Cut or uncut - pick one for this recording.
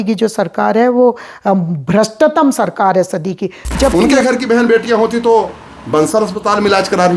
cut